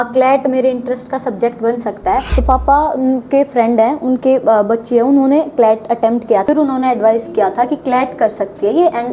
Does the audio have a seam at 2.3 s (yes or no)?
yes